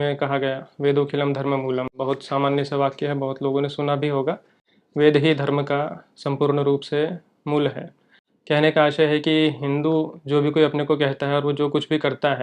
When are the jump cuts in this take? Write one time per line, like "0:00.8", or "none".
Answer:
none